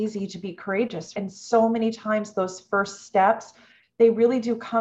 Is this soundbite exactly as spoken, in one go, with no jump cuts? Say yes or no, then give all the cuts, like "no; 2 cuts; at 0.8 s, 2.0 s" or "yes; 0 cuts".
no; 1 cut; at 1.1 s